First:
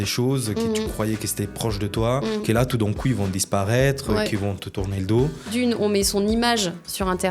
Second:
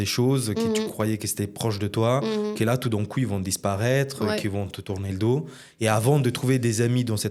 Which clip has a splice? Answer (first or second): first